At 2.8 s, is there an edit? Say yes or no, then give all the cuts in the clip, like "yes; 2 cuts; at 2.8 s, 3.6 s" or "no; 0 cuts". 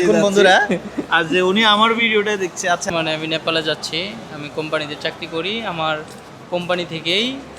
yes; 1 cut; at 2.8 s